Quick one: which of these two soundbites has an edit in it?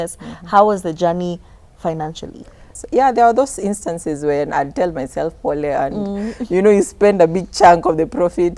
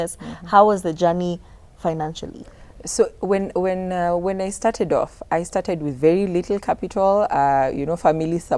first; 1 cut; at 2.7 s

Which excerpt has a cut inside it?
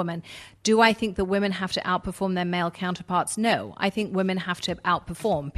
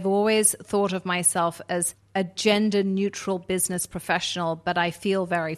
second; 1 cut; at 2.0 s

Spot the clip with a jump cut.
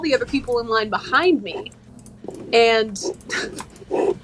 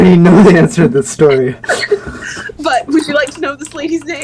second; 1 cut; at 1.6 s

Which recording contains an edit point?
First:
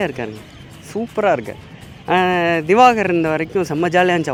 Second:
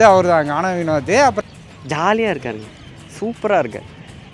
second; 1 cut; at 1.4 s

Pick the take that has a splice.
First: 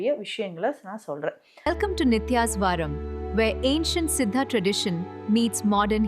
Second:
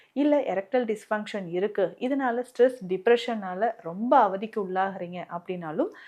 first; 1 cut; at 1.7 s

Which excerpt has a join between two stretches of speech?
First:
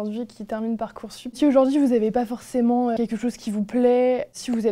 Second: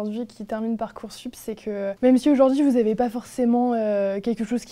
first; 2 cuts; at 1.4 s, 3.0 s

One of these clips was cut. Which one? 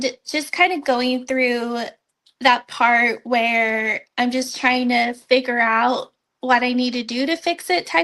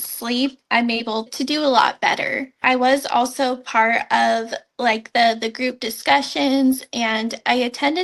second; 2 cuts; at 1.3 s, 2.6 s

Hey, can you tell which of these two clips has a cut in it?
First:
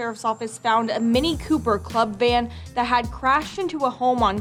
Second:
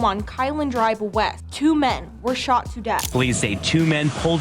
second; 2 cuts; at 1.4 s, 3.1 s

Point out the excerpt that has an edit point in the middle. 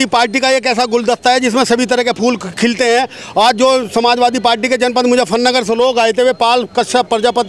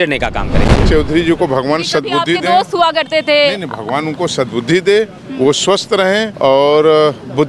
second; 2 cuts; at 0.8 s, 6.3 s

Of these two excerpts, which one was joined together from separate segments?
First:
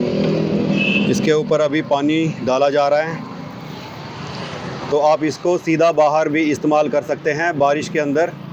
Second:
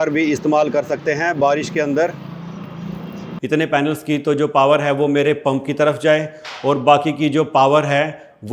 second; 1 cut; at 3.4 s

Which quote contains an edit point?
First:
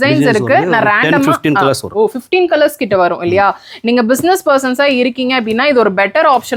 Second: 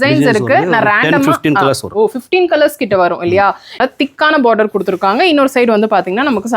second; 1 cut; at 3.8 s

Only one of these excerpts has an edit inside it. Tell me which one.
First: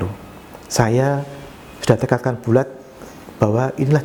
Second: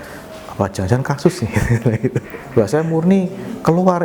second; 1 cut; at 2.4 s

